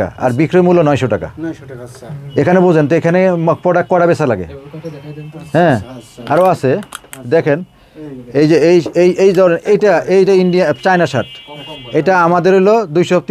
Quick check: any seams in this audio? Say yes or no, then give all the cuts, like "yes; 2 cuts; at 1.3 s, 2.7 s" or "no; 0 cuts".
no; 0 cuts